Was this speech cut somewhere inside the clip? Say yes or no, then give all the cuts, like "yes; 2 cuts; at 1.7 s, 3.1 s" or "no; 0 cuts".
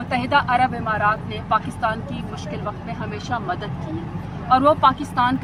no; 0 cuts